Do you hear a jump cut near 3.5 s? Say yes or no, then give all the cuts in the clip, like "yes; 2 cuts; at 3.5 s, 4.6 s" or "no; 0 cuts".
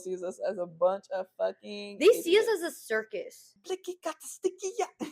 yes; 1 cut; at 3.5 s